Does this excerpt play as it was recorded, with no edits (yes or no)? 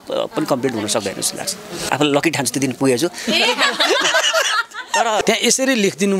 no